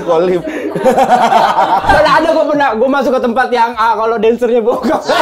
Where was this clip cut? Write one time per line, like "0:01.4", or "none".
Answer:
0:01.8